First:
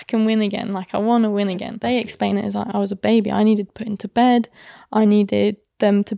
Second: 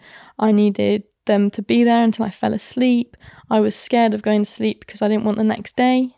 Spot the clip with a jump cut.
first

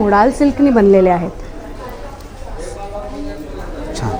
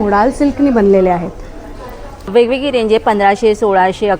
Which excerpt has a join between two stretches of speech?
second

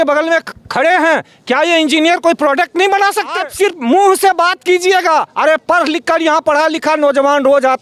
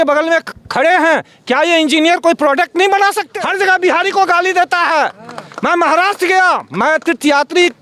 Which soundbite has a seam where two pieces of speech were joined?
second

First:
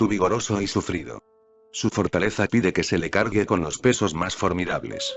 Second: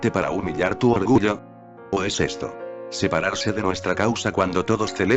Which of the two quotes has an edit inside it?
first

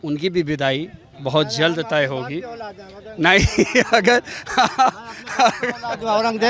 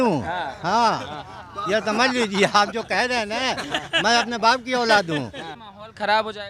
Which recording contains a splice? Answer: second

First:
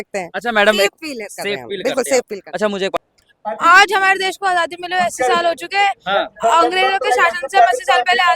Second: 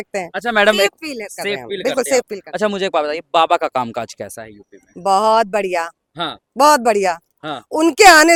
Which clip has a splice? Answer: first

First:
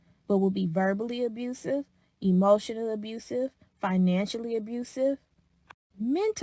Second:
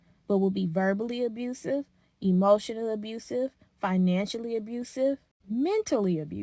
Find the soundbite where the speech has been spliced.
second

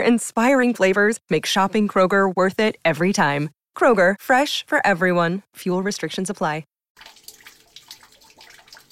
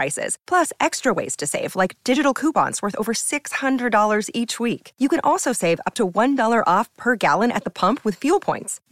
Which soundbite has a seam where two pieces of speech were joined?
first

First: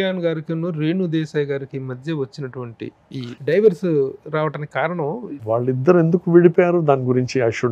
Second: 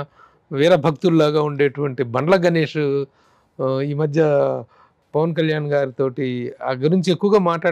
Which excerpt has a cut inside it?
first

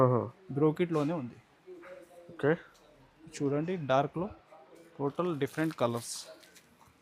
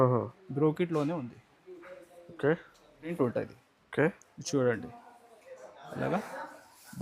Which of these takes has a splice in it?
second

